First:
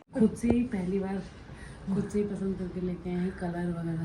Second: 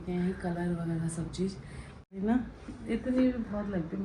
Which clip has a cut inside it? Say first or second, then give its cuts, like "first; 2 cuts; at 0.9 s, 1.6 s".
second; 1 cut; at 2.1 s